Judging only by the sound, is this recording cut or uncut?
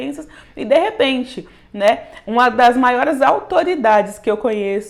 uncut